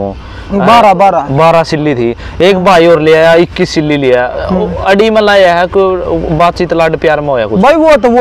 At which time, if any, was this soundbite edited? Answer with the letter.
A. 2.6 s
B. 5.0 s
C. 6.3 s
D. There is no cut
D